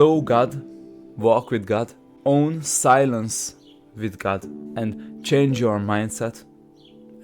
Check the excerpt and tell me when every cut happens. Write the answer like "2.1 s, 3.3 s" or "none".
2.0 s, 4.6 s